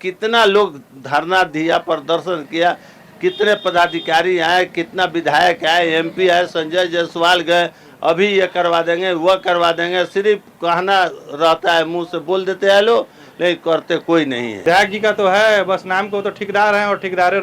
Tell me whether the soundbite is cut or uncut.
cut